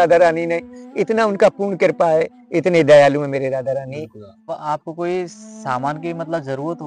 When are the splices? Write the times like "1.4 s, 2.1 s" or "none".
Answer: 4.5 s

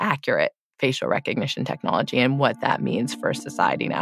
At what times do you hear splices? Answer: none

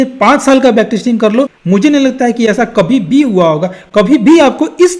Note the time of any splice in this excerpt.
1.6 s

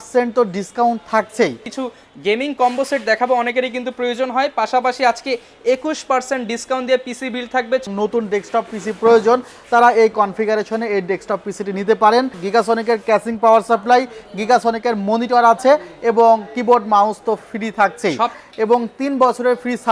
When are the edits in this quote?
1.7 s, 7.8 s, 12.4 s, 18.4 s

